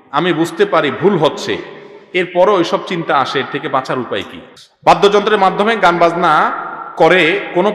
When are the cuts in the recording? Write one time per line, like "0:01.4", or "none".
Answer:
0:04.4